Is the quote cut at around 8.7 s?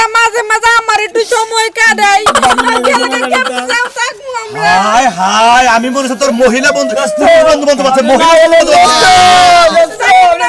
no; 0 cuts

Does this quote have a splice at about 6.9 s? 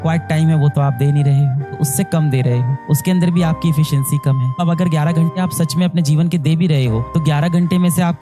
no; 2 cuts; at 1.7 s, 4.6 s

